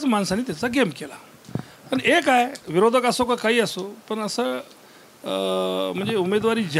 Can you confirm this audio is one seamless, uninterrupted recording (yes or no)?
yes